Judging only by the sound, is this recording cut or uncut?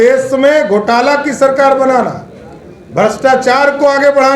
uncut